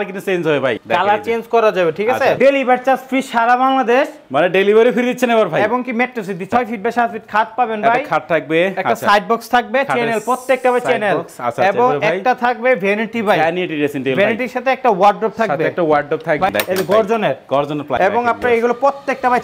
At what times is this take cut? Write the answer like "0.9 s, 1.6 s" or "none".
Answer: 0.8 s, 2.4 s, 6.5 s, 16.5 s, 17.9 s